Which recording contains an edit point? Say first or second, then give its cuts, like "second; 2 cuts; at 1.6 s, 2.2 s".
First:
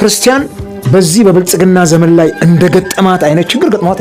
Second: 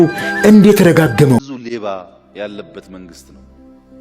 second; 1 cut; at 1.4 s